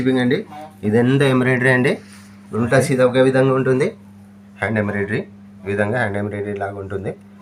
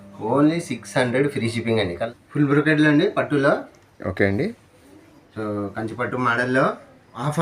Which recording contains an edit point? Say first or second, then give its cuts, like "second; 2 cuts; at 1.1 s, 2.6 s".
second; 1 cut; at 2.0 s